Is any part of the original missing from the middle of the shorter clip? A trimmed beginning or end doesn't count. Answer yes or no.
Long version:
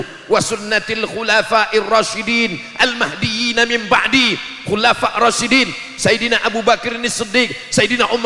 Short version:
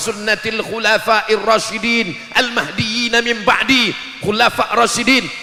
no